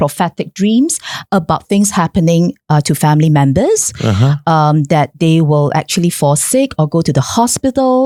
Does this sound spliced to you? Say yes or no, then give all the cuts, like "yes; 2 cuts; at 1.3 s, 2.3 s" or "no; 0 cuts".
no; 0 cuts